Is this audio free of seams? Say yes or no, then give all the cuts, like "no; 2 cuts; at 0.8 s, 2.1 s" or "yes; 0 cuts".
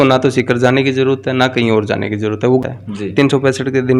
no; 1 cut; at 2.6 s